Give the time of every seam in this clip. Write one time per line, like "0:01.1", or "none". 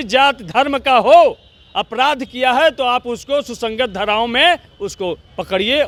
none